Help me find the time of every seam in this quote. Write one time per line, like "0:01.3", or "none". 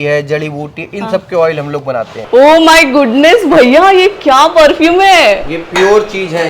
0:02.1